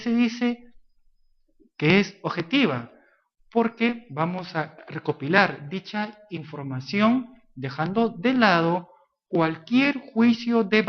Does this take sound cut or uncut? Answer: cut